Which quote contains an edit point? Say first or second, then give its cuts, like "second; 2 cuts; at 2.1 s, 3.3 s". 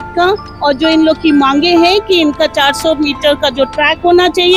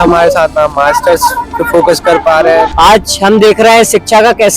second; 1 cut; at 2.7 s